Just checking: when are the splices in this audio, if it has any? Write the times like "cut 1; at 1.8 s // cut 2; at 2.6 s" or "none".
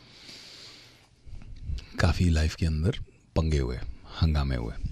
none